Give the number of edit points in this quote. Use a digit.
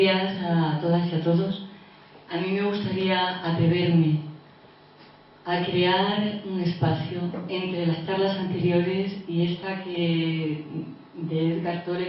0